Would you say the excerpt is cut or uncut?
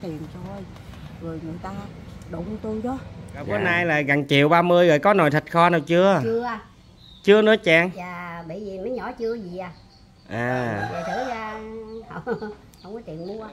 cut